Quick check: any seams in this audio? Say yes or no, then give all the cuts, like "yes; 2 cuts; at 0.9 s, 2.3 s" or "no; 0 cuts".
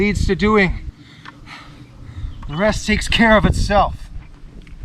no; 0 cuts